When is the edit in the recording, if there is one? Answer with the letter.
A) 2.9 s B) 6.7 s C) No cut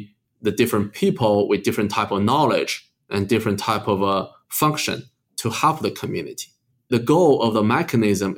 B